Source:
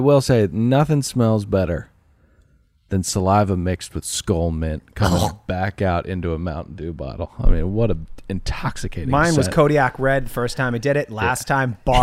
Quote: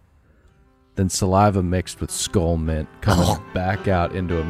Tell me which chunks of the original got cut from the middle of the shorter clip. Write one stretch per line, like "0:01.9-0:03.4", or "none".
none